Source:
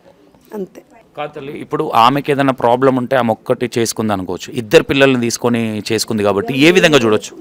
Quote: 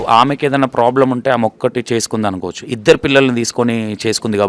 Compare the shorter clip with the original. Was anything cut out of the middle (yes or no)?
no